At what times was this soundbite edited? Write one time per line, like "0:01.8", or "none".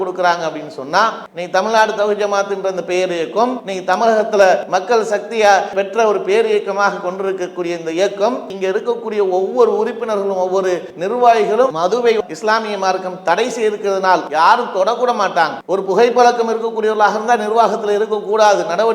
0:01.3
0:03.7
0:04.6
0:08.5
0:10.9
0:11.7
0:14.3
0:15.6